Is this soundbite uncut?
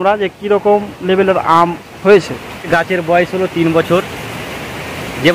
no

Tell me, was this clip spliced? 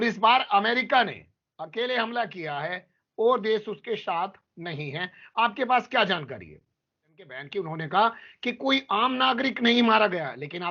yes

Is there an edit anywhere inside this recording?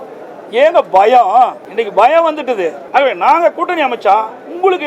yes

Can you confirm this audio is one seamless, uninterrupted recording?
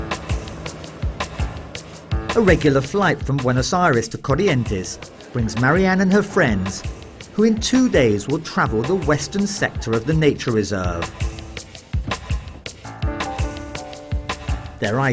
yes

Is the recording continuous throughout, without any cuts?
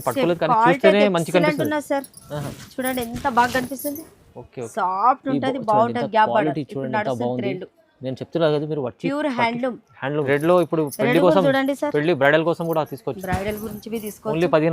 no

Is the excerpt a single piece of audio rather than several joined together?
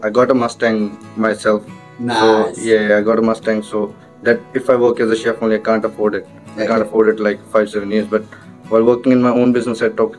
yes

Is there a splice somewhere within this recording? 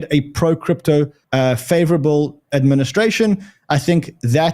yes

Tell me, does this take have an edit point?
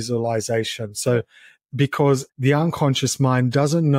yes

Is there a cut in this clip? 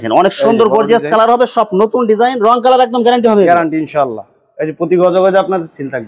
no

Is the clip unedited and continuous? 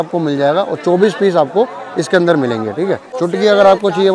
no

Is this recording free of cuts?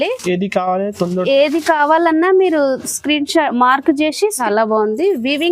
no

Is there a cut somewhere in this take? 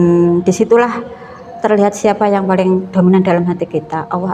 no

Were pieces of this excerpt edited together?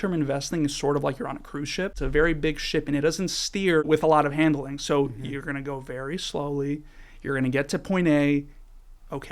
yes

